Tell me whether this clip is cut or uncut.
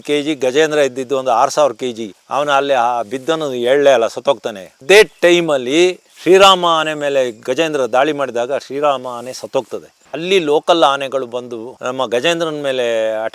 cut